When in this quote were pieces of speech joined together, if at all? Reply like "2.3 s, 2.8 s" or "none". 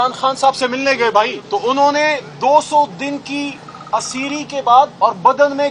1.4 s, 4.9 s